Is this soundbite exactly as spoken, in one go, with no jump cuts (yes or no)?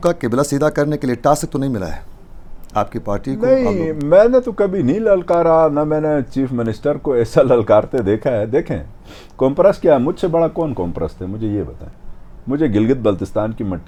yes